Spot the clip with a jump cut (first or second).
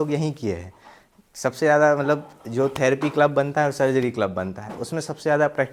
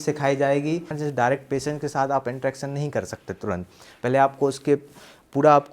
second